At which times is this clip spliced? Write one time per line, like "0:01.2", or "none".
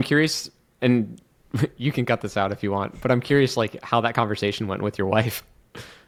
none